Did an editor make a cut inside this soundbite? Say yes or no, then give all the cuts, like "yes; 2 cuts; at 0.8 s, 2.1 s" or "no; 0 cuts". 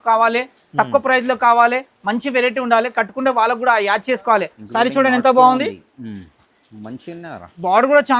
yes; 1 cut; at 4.6 s